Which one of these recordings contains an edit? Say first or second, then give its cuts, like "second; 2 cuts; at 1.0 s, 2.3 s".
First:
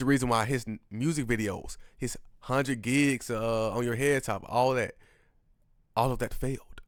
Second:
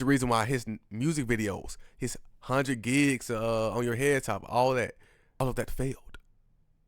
second; 1 cut; at 5.4 s